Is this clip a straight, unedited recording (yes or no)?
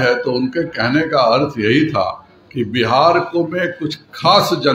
yes